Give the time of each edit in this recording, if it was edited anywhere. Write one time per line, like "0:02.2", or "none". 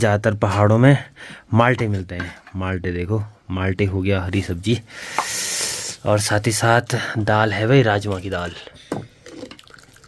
none